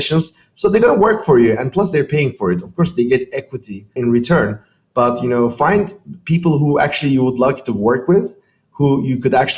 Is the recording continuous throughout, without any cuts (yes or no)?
no